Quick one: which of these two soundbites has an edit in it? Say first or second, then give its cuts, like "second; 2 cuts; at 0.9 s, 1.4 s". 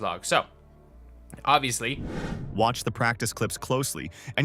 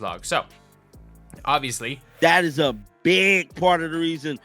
second; 1 cut; at 2.1 s